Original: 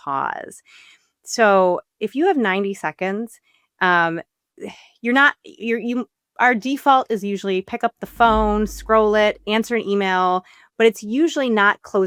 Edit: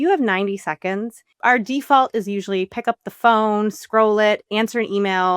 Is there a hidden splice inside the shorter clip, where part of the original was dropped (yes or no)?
yes